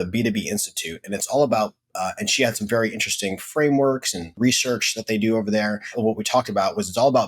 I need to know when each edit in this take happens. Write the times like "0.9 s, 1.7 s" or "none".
4.3 s, 5.9 s